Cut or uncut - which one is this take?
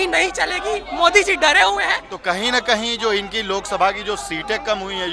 cut